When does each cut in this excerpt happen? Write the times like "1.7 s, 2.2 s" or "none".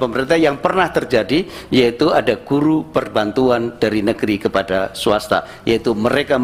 none